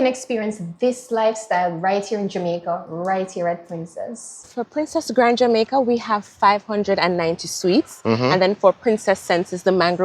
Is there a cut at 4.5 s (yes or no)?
yes